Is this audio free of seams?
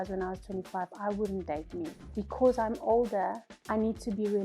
no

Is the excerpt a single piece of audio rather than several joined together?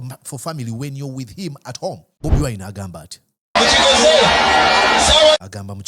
no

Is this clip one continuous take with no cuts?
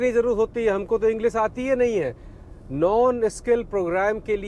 yes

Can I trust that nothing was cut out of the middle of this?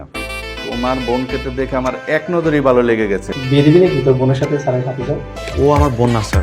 no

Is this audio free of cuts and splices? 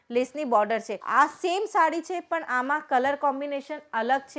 no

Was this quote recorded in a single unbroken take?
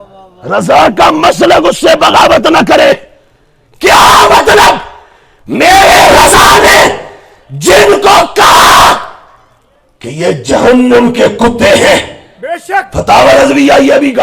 yes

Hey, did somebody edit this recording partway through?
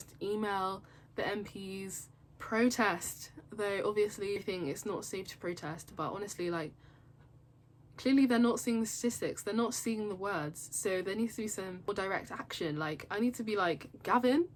no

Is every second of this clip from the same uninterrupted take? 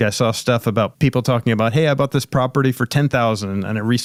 yes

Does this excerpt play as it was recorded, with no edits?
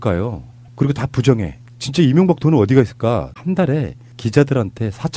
no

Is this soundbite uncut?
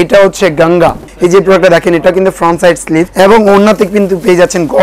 no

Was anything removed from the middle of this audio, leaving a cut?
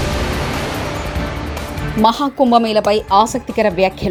no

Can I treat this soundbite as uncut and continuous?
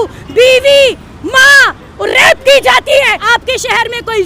no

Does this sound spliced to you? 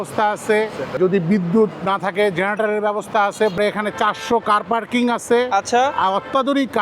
yes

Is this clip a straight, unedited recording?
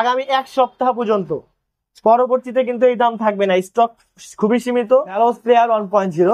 no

